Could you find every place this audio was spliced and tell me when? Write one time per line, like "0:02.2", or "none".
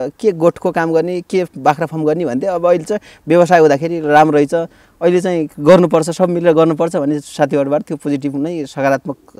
none